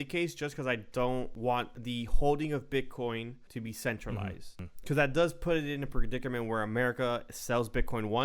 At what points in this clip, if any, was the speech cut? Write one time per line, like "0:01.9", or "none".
0:01.6
0:03.4
0:04.7